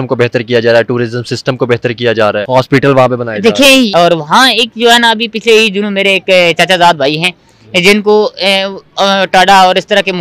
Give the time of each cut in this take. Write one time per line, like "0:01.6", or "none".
0:02.4
0:03.9

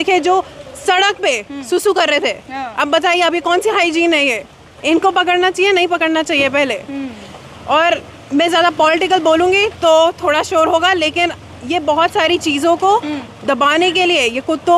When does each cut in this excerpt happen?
none

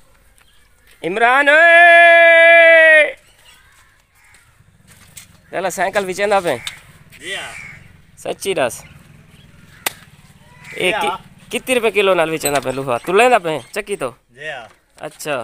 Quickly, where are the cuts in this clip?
none

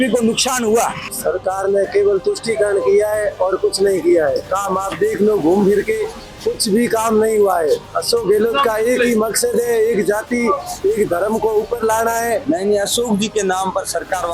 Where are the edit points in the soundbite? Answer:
0:01.1
0:12.4

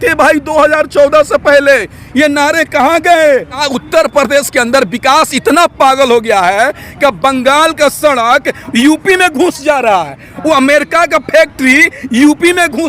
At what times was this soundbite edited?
0:03.7

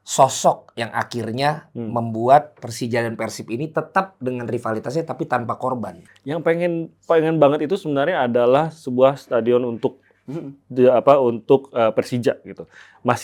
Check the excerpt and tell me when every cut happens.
0:06.0

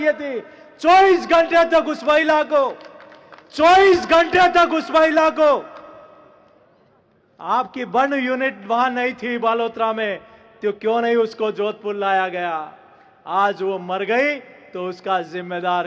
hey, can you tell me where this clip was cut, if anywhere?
none

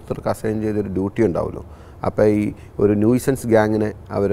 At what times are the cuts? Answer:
none

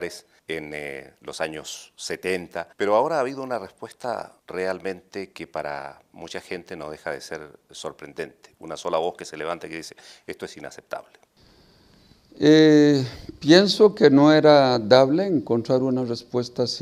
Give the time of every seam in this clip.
none

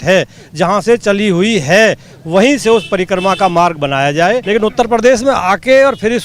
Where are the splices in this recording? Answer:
0:04.4

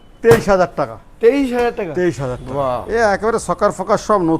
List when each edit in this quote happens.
0:02.3

